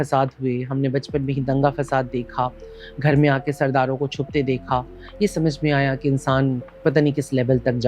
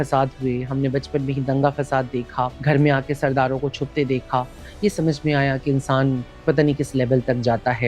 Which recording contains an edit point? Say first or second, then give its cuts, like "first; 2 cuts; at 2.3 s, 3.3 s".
second; 1 cut; at 2.6 s